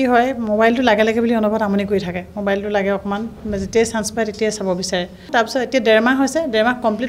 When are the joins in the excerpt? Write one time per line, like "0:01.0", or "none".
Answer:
0:05.3